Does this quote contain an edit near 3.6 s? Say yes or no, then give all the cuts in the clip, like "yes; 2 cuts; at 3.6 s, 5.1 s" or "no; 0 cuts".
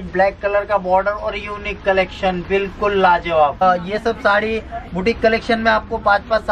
yes; 1 cut; at 3.6 s